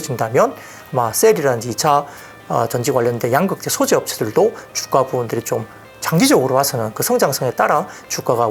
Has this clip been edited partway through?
no; 0 cuts

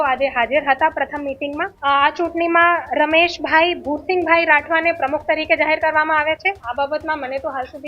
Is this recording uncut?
no; 2 cuts; at 1.7 s, 6.6 s

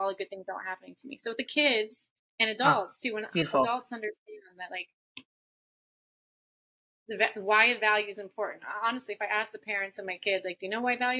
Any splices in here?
no; 0 cuts

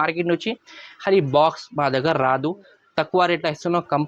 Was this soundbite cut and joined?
no; 0 cuts

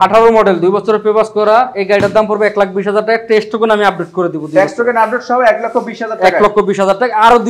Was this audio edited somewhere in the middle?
no; 0 cuts

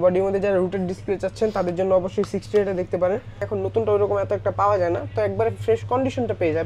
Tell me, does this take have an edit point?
yes; 1 cut; at 3.4 s

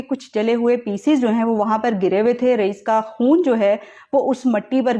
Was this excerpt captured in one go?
yes; 0 cuts

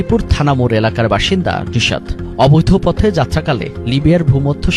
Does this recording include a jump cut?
no; 0 cuts

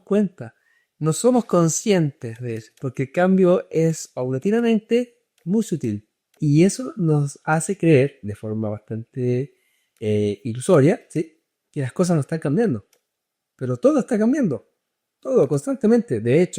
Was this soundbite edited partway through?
yes; 1 cut; at 6.2 s

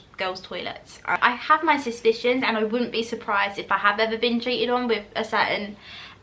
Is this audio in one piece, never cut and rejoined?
no; 1 cut; at 1.2 s

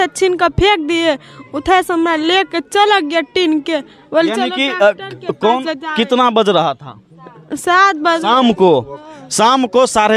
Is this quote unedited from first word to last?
yes; 0 cuts

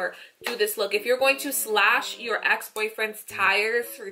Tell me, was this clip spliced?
no; 0 cuts

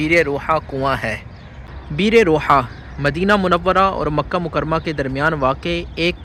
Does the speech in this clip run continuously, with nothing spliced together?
yes; 0 cuts

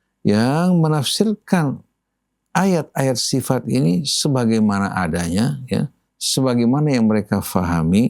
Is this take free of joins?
yes; 0 cuts

